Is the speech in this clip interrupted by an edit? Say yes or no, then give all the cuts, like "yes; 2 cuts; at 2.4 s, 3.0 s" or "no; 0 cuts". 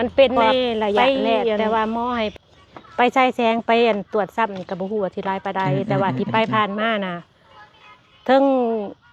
yes; 1 cut; at 2.3 s